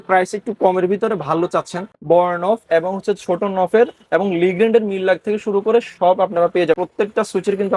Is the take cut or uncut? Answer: cut